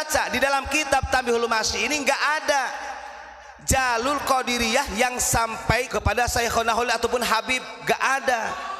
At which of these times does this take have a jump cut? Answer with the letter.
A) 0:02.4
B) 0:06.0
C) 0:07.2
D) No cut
B